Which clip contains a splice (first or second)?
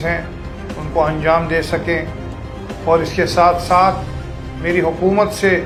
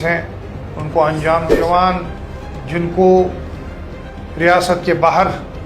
second